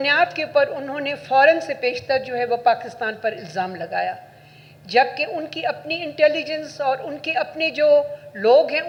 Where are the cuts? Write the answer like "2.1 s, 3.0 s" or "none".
none